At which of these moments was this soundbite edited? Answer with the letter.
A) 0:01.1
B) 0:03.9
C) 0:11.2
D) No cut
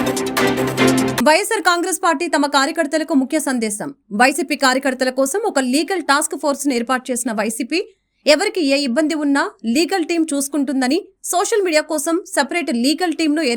A